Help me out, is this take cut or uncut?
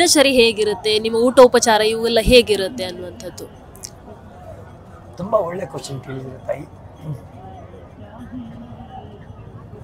uncut